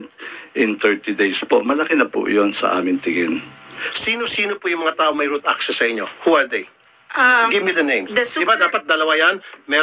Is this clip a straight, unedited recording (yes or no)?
no